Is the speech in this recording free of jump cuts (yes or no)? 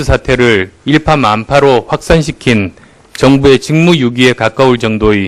no